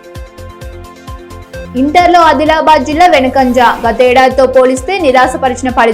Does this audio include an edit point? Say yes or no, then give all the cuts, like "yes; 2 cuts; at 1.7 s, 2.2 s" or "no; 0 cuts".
yes; 1 cut; at 1.3 s